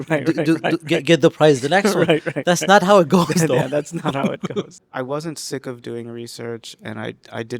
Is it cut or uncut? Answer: cut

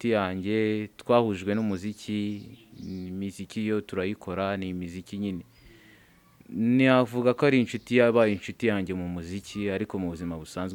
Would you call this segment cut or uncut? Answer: uncut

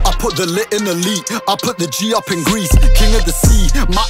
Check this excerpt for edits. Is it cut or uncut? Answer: uncut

